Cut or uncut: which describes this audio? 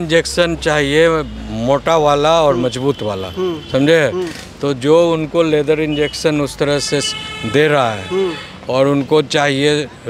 uncut